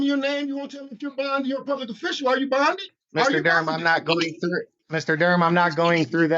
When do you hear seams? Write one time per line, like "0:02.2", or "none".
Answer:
0:02.9
0:04.8